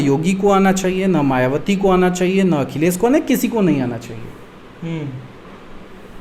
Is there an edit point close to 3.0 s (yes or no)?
no